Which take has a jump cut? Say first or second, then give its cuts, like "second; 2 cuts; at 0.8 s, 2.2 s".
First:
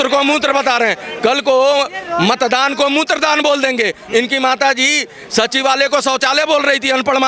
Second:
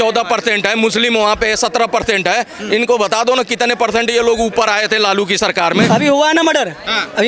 second; 1 cut; at 5.9 s